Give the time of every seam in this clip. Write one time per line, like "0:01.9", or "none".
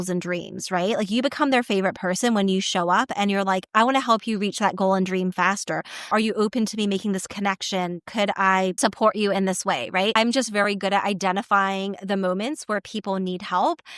0:06.1
0:08.8
0:10.1